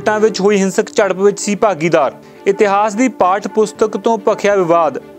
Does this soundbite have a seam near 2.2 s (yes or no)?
no